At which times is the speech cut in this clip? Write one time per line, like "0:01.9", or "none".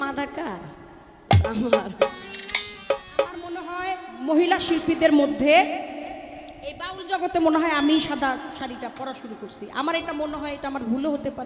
0:03.7